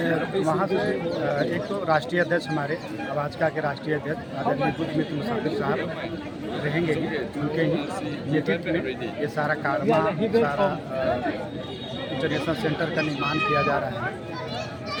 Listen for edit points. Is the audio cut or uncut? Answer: uncut